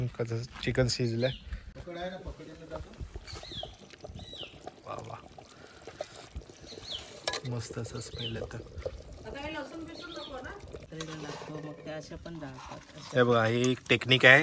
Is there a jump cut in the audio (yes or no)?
yes